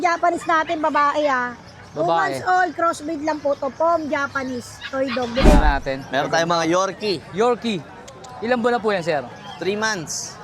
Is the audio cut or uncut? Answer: cut